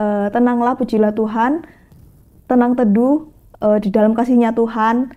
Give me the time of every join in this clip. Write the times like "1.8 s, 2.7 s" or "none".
none